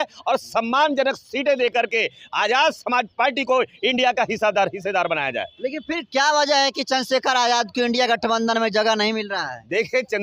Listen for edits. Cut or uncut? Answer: uncut